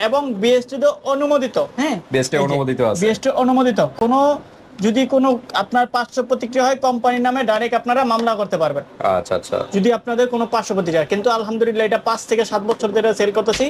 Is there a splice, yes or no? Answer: no